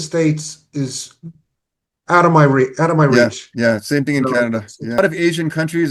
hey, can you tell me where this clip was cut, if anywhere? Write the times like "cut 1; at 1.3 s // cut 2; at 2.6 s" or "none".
cut 1; at 5.0 s